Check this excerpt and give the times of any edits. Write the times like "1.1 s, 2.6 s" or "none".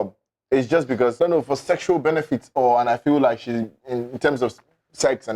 1.2 s